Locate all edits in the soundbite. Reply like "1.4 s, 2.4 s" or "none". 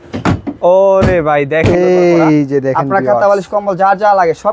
1.7 s